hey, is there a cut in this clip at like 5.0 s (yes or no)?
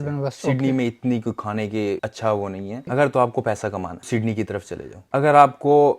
yes